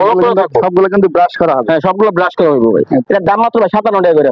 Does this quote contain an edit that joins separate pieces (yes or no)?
yes